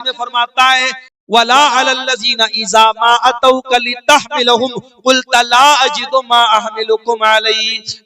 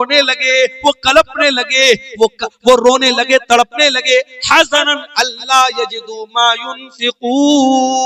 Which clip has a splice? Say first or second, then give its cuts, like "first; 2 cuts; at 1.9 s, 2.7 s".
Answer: first; 1 cut; at 1.0 s